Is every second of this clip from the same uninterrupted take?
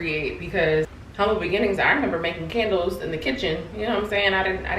no; 1 cut; at 1.0 s

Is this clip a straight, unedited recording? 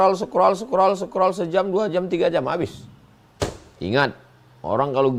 yes; 0 cuts

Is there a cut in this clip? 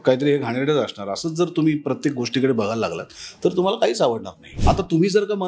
yes; 1 cut; at 4.4 s

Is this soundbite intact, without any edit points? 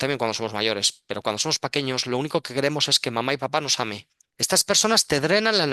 no; 1 cut; at 4.0 s

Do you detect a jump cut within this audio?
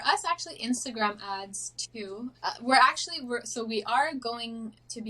yes; 1 cut; at 2.4 s

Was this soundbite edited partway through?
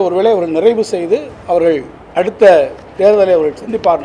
yes; 1 cut; at 2.0 s

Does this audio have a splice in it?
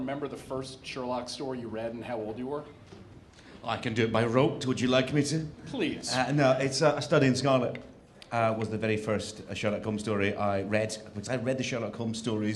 no; 0 cuts

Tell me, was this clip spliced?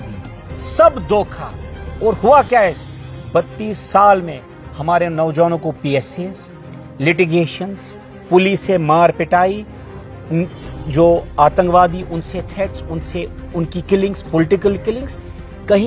no; 0 cuts

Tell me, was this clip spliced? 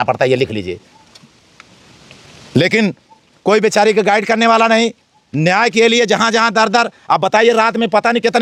no; 0 cuts

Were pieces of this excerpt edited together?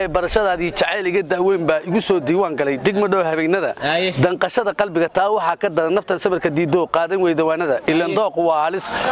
no; 0 cuts

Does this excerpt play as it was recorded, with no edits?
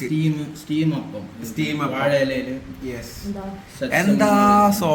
yes; 0 cuts

